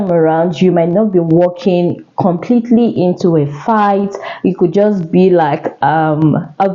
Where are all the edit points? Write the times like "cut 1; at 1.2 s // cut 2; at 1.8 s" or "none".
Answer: none